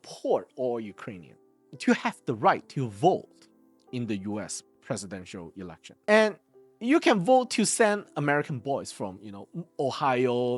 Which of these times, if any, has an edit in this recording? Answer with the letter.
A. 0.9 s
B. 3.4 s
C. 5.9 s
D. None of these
C